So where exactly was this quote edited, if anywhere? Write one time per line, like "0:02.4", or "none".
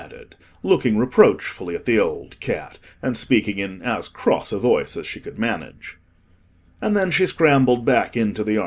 none